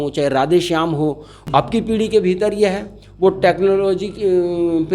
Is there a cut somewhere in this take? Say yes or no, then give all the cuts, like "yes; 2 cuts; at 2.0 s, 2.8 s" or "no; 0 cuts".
yes; 1 cut; at 1.3 s